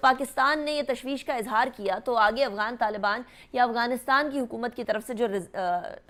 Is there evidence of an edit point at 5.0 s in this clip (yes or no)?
no